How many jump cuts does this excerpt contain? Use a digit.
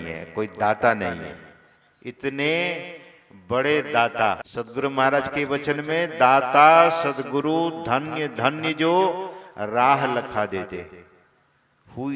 1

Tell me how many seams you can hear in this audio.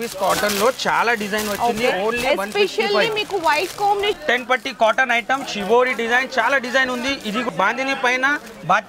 2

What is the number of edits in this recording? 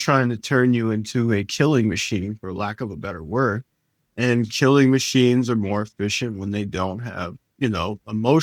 0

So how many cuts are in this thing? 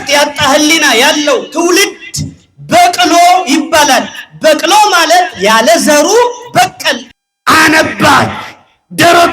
1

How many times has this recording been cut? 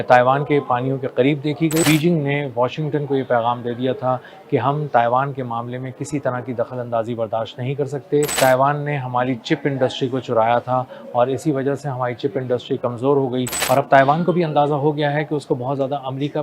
3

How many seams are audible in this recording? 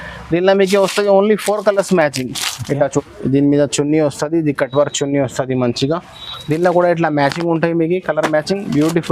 1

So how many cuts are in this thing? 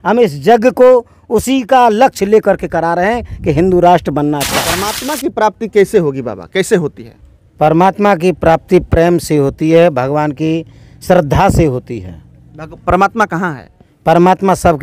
1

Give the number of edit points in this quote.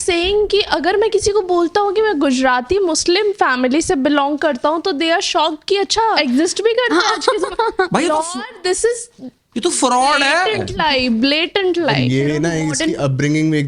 2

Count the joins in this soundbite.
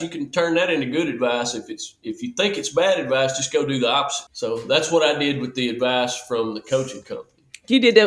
1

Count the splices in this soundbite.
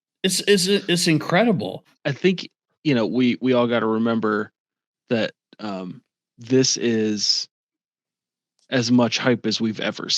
1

